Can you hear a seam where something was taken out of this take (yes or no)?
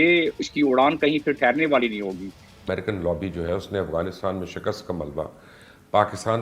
yes